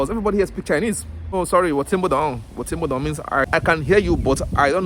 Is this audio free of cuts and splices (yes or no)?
no